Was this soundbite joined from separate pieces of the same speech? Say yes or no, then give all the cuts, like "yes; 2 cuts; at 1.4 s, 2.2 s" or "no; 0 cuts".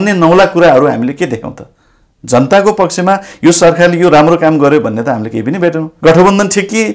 yes; 1 cut; at 5.9 s